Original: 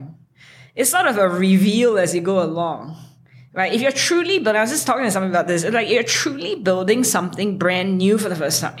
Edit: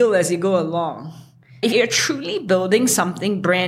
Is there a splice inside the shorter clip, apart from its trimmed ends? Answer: yes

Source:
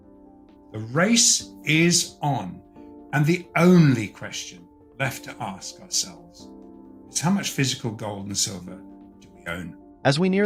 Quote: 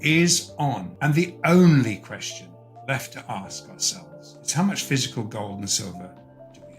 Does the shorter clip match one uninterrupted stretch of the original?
no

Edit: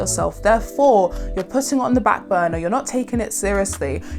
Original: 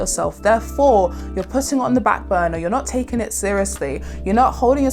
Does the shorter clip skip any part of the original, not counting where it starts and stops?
no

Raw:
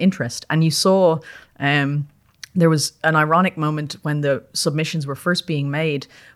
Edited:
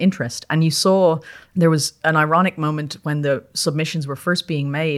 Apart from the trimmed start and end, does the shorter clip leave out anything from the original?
yes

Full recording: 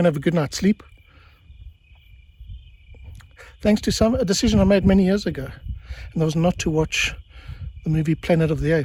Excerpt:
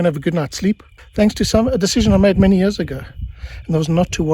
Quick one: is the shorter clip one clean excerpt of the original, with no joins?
no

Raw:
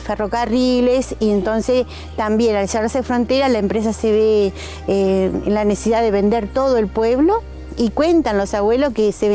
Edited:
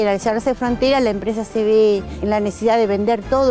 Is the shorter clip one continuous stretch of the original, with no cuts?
no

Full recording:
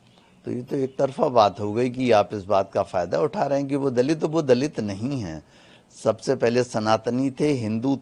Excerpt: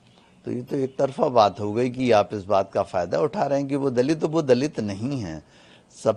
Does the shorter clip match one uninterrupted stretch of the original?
yes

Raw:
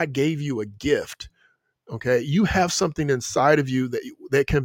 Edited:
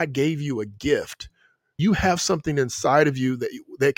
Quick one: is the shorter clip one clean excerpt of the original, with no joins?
no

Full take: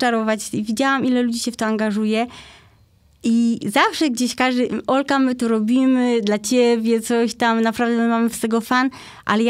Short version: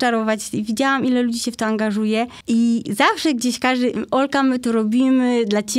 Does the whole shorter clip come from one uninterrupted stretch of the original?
no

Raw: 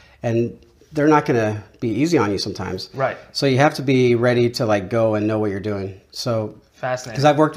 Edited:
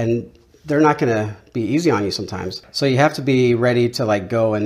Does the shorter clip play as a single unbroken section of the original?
no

